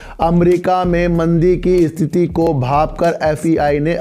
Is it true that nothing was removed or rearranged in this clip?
yes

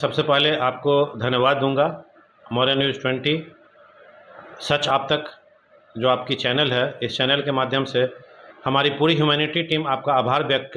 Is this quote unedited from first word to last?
yes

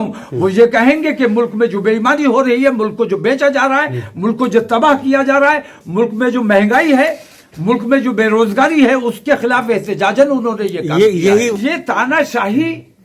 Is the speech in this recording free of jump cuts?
no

